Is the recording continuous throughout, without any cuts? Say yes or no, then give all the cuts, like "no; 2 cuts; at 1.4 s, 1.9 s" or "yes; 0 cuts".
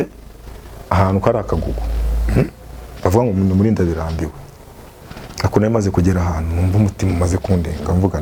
yes; 0 cuts